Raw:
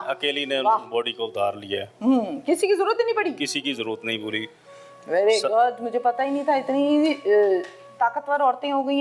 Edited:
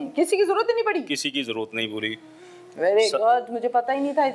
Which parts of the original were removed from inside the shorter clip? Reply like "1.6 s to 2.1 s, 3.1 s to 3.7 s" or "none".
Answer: none